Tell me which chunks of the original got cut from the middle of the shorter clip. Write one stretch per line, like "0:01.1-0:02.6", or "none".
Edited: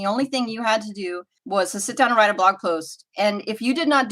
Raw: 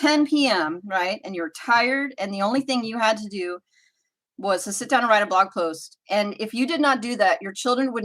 0:03.7-0:04.2